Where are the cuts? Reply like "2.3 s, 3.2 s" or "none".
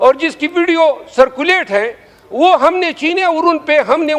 none

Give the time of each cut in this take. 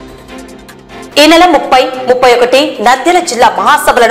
1.1 s

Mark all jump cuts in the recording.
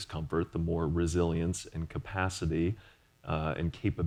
none

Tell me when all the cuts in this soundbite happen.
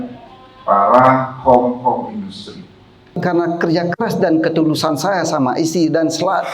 3.2 s

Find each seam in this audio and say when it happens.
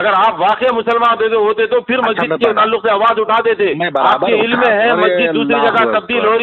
none

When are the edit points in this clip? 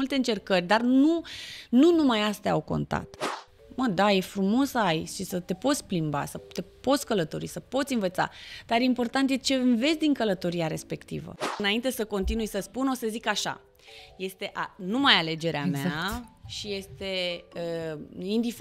3.1 s, 11.4 s

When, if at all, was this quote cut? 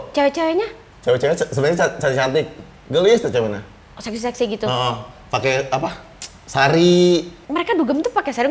7.4 s

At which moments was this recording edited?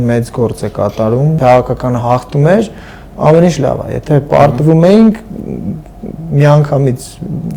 1.4 s

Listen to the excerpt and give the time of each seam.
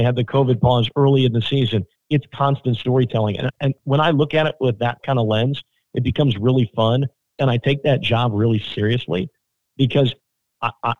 1.9 s

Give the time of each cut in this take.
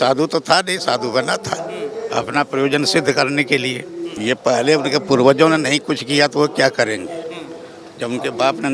4.1 s

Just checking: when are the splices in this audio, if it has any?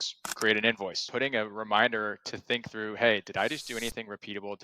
1.0 s

